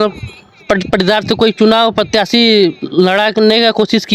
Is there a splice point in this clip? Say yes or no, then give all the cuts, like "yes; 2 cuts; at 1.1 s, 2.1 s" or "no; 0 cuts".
no; 0 cuts